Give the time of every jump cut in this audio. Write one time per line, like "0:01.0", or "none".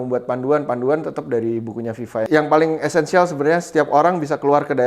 0:02.3